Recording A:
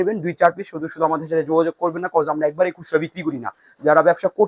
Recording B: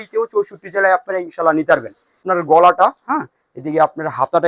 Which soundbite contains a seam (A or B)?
B